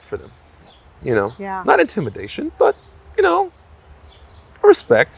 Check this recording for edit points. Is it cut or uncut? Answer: uncut